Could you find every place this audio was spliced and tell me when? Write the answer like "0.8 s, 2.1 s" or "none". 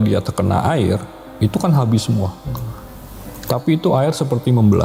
none